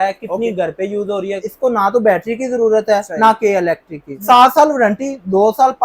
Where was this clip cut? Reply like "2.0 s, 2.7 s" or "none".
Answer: 1.5 s, 4.1 s

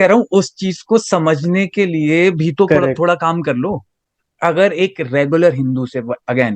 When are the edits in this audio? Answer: 3.9 s

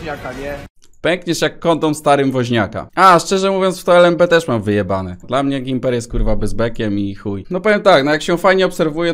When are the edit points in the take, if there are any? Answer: 2.8 s, 5.1 s, 7.4 s

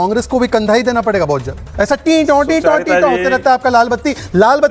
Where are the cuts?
1.6 s

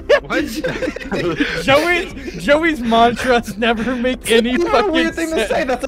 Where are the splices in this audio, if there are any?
none

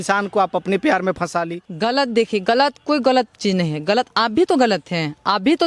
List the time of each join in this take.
1.6 s

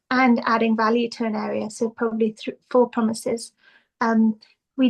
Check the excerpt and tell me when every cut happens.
none

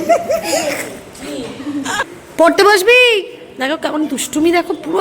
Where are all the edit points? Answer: 2.1 s

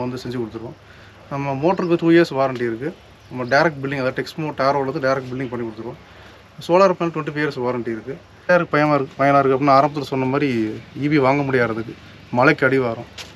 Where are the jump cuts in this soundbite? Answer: 8.5 s

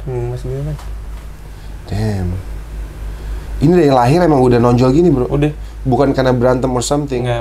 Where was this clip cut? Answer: none

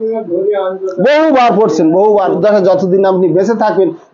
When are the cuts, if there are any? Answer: 2.4 s

